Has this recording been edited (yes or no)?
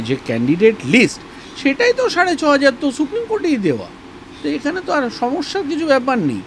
no